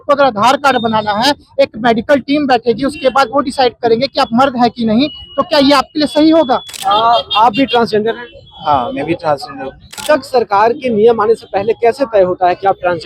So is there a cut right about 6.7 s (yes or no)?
yes